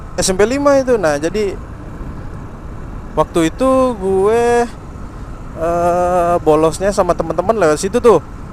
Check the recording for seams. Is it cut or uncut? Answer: uncut